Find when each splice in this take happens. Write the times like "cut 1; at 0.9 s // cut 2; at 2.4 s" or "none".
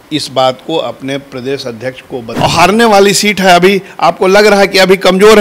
cut 1; at 2.3 s